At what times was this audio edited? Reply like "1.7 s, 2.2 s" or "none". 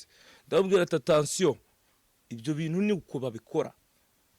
none